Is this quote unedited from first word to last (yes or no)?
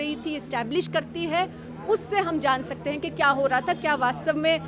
yes